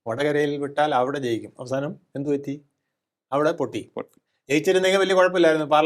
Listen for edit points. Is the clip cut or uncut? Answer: uncut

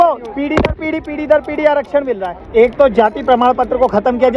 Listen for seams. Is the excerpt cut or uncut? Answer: cut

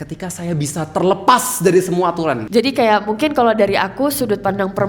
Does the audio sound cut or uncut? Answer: cut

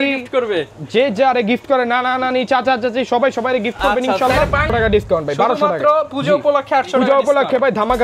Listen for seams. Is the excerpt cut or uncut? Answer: cut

